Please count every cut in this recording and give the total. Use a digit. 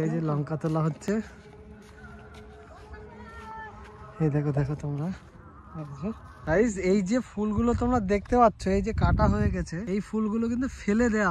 2